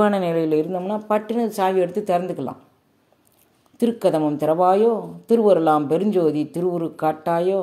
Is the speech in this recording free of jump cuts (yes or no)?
yes